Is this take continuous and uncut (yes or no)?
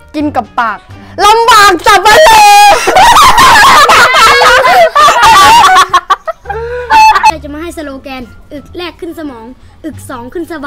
no